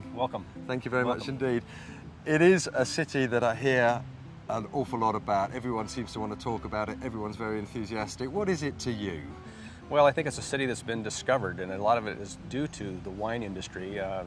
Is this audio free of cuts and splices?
yes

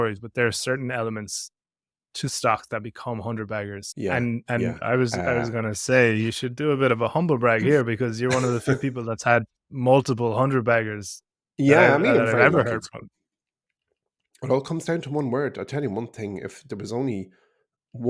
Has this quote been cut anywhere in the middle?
yes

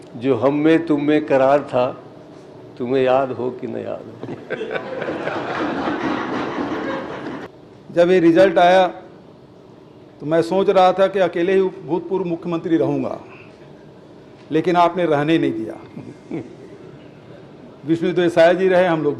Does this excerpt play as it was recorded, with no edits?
no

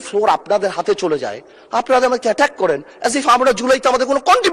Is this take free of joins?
yes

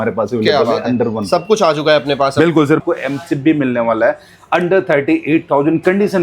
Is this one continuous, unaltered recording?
no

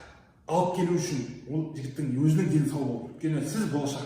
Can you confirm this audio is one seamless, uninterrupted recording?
no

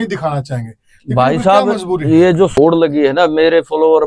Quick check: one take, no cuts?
no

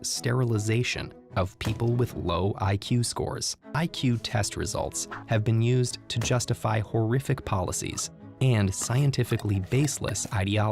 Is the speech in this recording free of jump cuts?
no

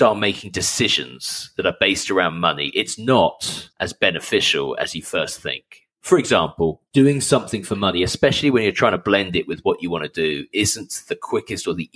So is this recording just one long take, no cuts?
no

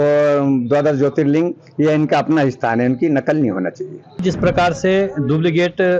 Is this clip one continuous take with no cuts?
no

